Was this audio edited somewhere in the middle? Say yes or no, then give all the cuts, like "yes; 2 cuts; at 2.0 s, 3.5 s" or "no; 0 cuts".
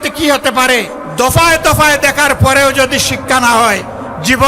yes; 1 cut; at 1.0 s